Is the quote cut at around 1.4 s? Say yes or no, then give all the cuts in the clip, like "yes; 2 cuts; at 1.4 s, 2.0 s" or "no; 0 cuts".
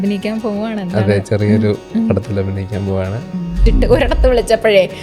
no; 1 cut; at 3.7 s